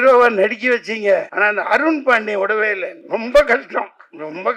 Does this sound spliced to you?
yes; 2 cuts; at 1.3 s, 2.9 s

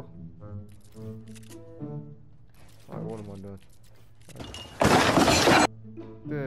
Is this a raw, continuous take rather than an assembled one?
yes; 0 cuts

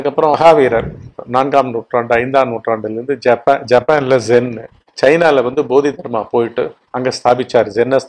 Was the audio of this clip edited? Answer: yes; 1 cut; at 1.1 s

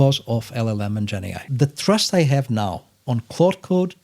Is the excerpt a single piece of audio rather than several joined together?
no; 1 cut; at 1.5 s

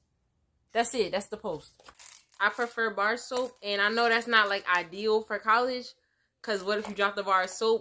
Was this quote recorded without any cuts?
no; 1 cut; at 1.8 s

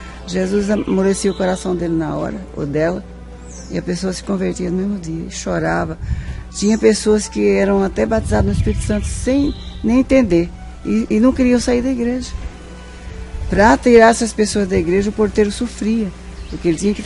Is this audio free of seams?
yes; 0 cuts

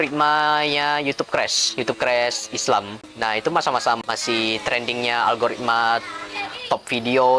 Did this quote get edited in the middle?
no; 0 cuts

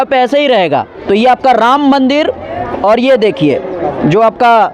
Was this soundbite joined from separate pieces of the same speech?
yes; 1 cut; at 0.9 s

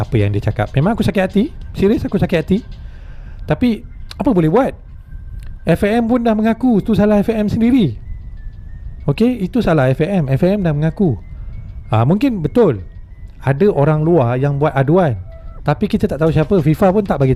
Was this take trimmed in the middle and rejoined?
no; 0 cuts

